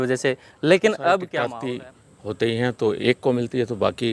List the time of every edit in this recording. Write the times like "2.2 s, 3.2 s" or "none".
1.4 s

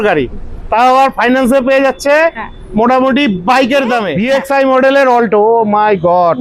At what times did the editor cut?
4.1 s

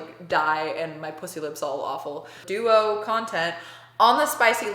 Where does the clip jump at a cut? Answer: 2.4 s

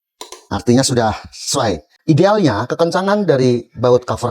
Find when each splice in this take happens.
1.9 s

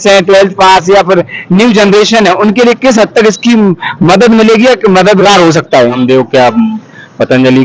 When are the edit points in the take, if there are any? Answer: 6.0 s

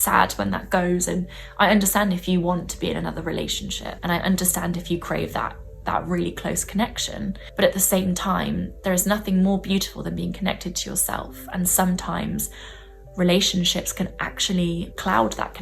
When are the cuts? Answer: 3.9 s, 7.4 s

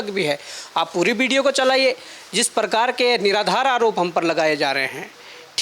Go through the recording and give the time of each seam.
none

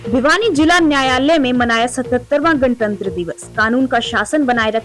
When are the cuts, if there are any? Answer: none

